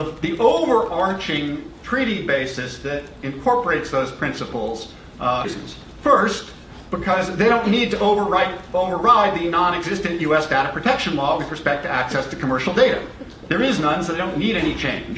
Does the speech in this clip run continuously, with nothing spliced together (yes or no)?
yes